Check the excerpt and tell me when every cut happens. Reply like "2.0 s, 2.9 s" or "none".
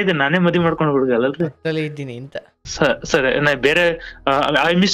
2.6 s